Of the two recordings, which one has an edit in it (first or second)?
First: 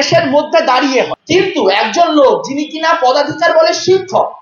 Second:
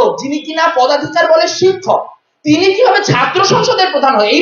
first